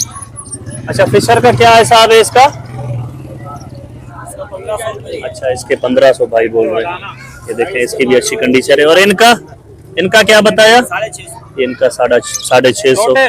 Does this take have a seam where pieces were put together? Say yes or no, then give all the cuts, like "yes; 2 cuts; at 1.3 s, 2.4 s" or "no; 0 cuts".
no; 0 cuts